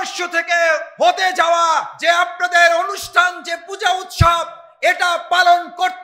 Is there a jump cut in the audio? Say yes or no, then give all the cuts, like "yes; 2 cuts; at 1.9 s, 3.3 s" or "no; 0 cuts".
yes; 2 cuts; at 0.9 s, 1.9 s